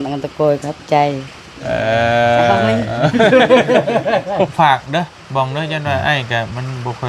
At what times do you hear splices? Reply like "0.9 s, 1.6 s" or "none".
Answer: 4.5 s